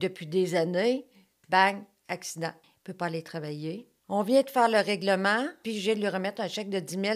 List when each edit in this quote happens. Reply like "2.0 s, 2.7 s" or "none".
2.7 s, 3.9 s, 5.6 s